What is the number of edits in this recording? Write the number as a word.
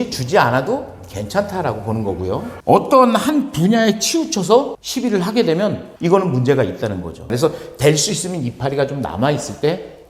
two